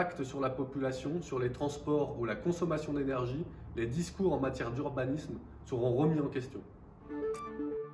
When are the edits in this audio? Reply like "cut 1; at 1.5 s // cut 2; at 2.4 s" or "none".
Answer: cut 1; at 7.0 s